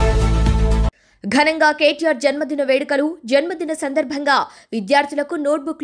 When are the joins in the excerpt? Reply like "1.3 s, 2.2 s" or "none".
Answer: 0.9 s